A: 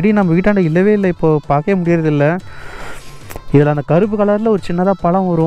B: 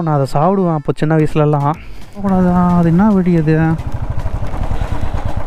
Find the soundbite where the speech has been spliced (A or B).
B